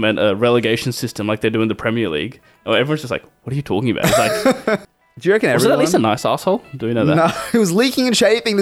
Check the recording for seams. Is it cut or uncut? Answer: cut